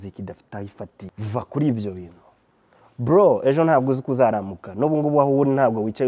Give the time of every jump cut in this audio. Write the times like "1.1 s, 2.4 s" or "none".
1.0 s